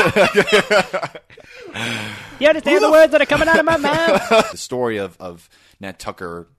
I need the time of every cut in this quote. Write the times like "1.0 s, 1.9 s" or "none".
4.5 s